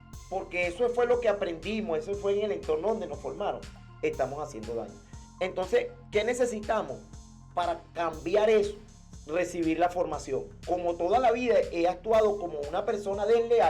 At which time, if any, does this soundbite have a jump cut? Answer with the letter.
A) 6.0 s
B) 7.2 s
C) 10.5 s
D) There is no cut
C